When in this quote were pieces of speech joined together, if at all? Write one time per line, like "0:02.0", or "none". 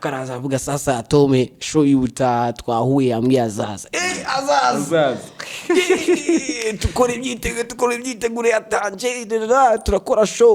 none